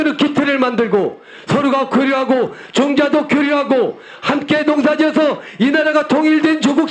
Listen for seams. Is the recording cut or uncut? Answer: uncut